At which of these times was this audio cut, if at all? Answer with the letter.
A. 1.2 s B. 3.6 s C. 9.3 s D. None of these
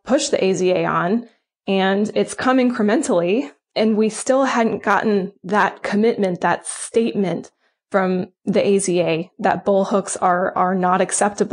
B